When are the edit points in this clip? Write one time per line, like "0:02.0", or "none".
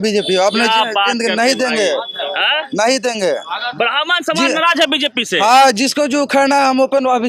none